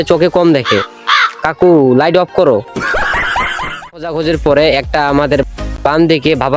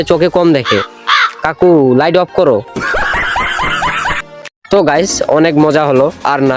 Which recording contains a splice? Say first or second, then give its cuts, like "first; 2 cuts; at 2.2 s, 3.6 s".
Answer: first; 1 cut; at 4.1 s